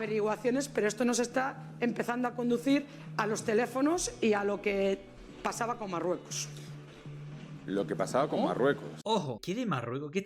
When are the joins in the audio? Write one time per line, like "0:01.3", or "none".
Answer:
0:09.3